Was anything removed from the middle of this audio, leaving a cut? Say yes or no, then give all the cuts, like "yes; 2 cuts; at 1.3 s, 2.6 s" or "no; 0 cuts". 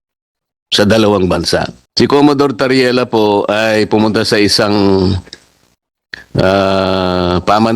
yes; 1 cut; at 1.8 s